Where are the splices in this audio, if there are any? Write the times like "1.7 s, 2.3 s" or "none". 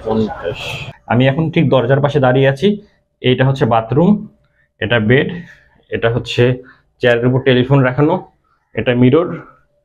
0.9 s